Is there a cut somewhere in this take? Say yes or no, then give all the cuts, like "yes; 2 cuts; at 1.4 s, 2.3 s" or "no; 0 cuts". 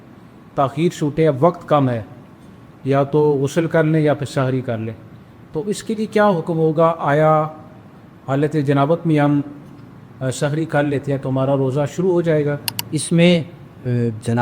yes; 1 cut; at 12.7 s